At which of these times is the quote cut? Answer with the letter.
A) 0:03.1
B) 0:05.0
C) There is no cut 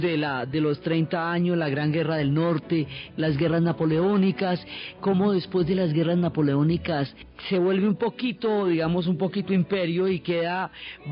A